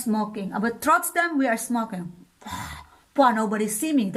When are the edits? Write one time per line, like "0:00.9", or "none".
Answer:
none

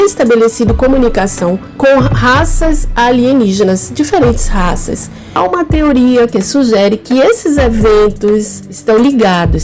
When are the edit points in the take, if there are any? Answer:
0:01.7
0:05.3

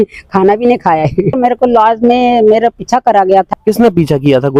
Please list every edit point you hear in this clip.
0:01.4
0:03.5

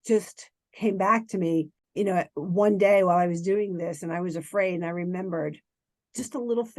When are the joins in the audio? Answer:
0:01.8

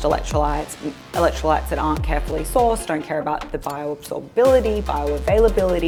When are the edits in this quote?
none

